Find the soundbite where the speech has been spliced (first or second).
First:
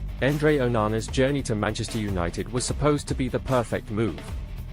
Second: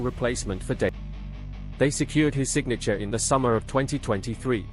second